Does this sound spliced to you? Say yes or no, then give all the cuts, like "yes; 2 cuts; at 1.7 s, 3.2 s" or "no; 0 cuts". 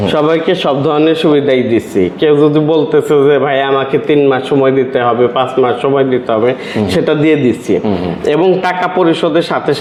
no; 0 cuts